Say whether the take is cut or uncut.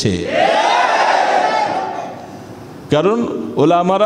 uncut